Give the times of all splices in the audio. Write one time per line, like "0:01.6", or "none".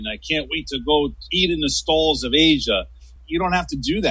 0:01.2